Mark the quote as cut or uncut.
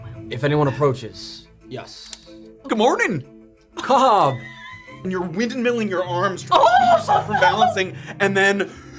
cut